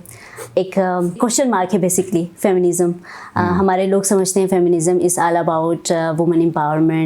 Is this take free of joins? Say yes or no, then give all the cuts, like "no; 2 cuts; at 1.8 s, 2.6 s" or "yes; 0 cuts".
no; 1 cut; at 1.2 s